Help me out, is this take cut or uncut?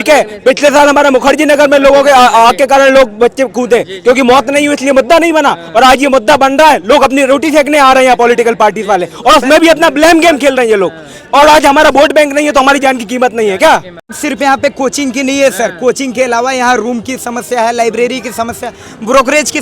cut